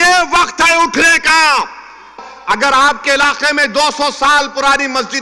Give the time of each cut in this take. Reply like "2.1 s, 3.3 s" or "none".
2.2 s